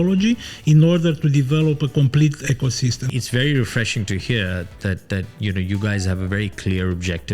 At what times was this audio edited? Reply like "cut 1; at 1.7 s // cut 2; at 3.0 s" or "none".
cut 1; at 3.1 s

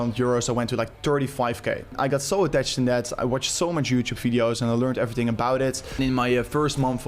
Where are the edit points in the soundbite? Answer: cut 1; at 1.9 s // cut 2; at 6.0 s

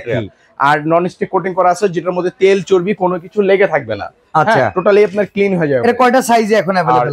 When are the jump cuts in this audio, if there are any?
none

